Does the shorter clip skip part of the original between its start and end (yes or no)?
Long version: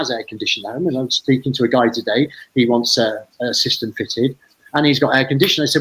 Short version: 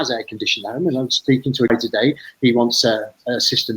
yes